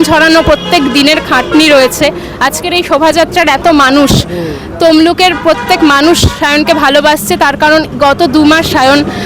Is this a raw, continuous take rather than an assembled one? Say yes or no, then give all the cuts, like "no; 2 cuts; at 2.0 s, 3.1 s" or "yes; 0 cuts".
yes; 0 cuts